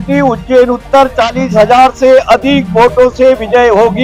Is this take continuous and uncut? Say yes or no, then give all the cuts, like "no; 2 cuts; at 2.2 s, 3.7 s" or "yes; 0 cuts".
yes; 0 cuts